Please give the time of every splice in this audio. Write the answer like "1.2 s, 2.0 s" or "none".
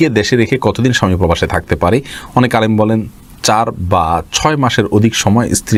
none

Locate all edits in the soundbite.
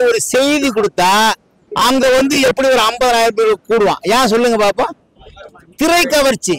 none

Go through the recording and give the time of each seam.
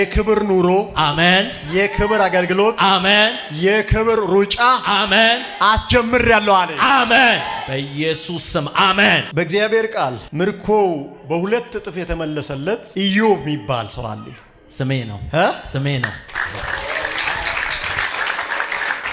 none

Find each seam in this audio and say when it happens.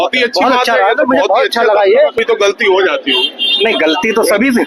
2.2 s

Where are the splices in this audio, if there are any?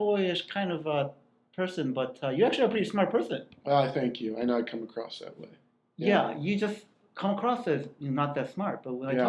none

